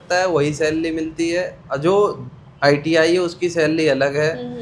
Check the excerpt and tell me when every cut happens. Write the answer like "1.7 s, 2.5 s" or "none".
none